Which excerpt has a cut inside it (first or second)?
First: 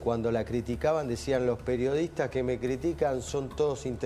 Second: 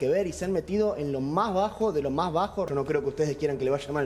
second